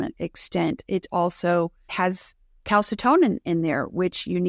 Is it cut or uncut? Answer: cut